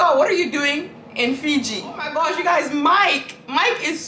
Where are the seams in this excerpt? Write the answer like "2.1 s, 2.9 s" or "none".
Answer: 2.1 s